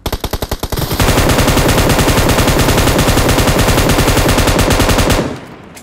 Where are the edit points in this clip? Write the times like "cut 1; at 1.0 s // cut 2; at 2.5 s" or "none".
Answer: none

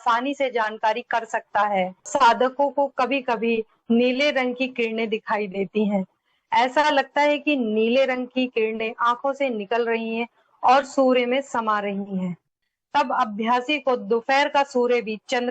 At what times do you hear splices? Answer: cut 1; at 2.1 s // cut 2; at 12.6 s

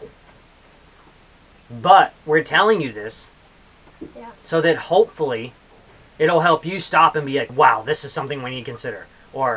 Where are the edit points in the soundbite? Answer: cut 1; at 7.5 s

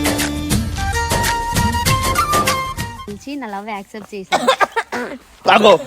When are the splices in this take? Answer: cut 1; at 3.1 s

